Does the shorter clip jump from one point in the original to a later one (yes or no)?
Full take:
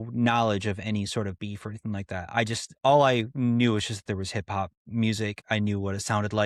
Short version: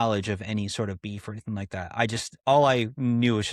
no